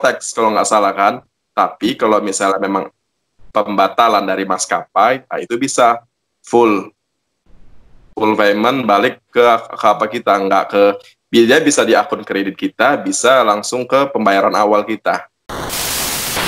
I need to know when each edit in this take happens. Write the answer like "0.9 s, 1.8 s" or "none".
15.4 s